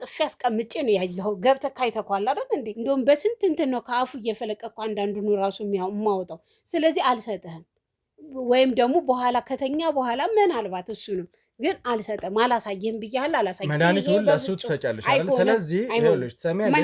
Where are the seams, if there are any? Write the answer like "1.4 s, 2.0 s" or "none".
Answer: 2.7 s